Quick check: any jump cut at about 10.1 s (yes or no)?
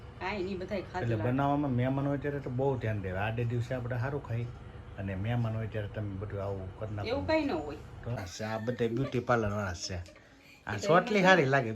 no